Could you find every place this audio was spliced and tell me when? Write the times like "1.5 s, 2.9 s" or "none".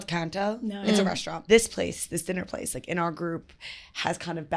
1.4 s